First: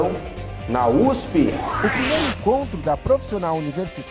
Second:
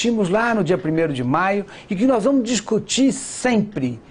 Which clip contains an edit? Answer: first; 1 cut; at 1.7 s

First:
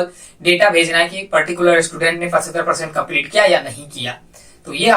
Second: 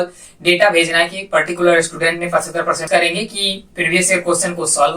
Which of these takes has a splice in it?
second; 1 cut; at 2.8 s

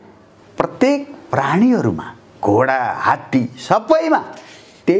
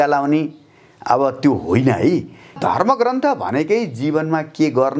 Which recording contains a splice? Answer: second; 1 cut; at 2.6 s

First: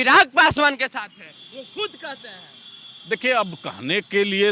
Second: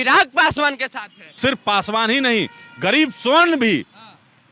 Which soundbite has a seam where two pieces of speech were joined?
second; 1 cut; at 1.2 s

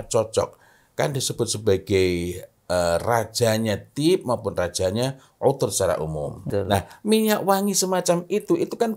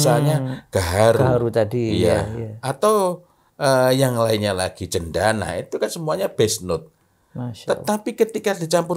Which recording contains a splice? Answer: first; 1 cut; at 6.4 s

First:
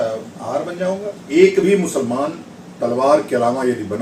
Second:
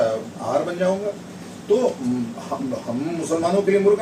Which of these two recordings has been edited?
first; 1 cut; at 1.2 s

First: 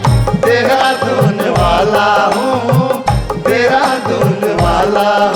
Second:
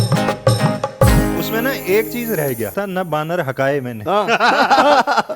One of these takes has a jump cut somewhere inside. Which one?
second; 1 cut; at 2.7 s

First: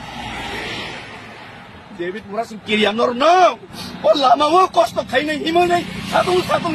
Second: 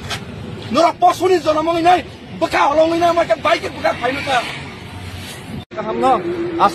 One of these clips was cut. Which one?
second; 1 cut; at 5.8 s

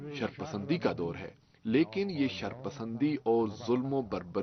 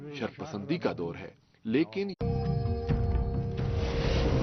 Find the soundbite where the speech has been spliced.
first; 1 cut; at 2.1 s

